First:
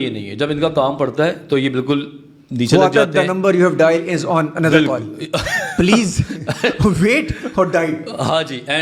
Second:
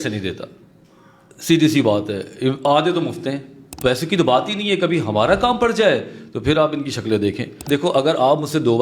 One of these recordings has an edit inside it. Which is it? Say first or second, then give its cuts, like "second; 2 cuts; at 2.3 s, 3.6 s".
second; 2 cuts; at 3.7 s, 7.6 s